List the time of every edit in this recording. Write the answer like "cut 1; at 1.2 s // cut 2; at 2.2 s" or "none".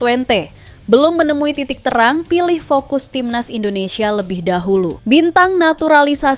cut 1; at 5.0 s